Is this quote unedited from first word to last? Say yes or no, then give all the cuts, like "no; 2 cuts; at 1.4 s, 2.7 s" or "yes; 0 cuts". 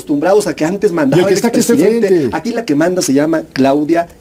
yes; 0 cuts